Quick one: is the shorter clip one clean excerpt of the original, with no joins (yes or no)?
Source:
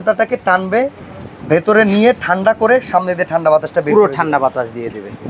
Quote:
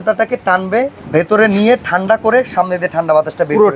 no